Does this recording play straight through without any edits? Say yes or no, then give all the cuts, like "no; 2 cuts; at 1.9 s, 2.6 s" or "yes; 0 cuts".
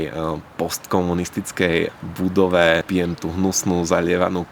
no; 2 cuts; at 1.9 s, 2.8 s